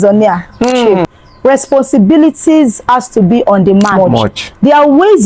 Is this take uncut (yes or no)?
no